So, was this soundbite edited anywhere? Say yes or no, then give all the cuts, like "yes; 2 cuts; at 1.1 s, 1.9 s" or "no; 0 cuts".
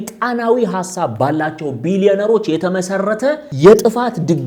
yes; 1 cut; at 3.5 s